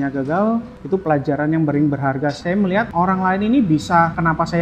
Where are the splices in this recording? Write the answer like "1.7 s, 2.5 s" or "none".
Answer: 2.4 s